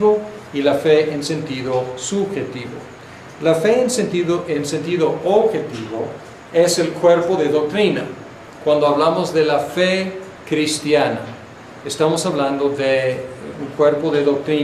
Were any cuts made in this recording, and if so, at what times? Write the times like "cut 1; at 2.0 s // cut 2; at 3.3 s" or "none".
none